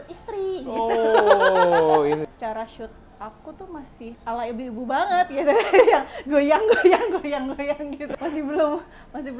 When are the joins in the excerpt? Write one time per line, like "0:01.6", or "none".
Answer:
0:02.3
0:04.2
0:08.1